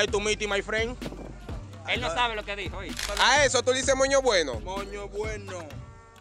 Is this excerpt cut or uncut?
cut